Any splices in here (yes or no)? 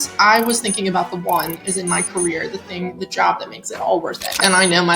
yes